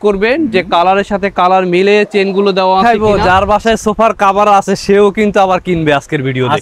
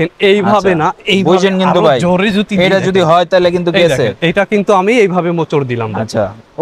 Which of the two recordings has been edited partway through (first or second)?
first